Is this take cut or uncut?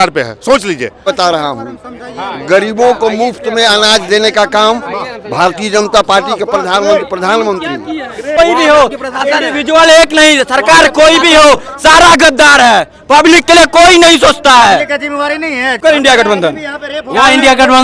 cut